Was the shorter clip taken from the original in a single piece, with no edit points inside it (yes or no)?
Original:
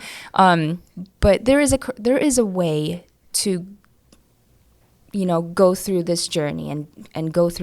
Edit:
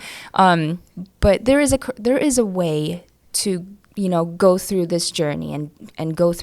no